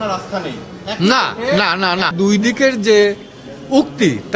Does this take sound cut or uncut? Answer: cut